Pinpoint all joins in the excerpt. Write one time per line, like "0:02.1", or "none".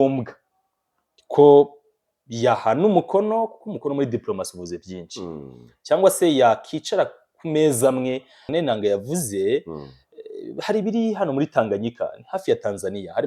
0:08.5

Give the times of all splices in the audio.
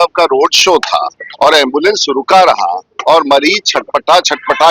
0:01.2
0:02.9

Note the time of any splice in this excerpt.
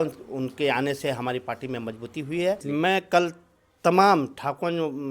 0:02.6

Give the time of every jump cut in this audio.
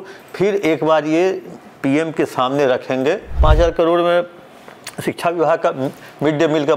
0:03.3

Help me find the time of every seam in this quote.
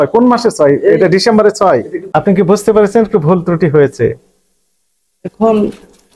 0:02.0

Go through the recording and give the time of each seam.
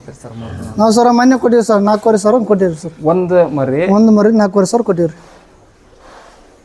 none

